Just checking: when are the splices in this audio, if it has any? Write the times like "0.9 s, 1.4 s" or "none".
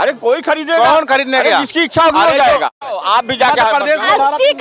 2.9 s